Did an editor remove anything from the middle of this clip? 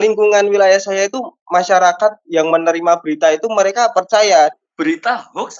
yes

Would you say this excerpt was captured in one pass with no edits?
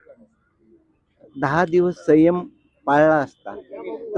yes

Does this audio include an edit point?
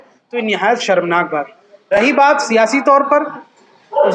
no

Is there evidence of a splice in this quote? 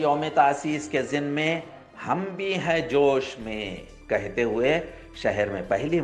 no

